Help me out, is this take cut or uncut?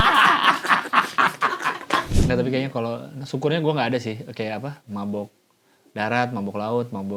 cut